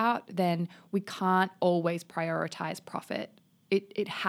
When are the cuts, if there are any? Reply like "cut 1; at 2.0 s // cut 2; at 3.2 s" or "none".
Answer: none